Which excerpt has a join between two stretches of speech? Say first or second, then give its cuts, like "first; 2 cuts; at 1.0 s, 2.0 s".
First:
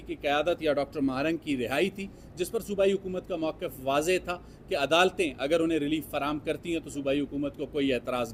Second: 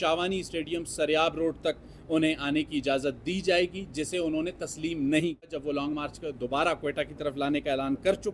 second; 1 cut; at 5.5 s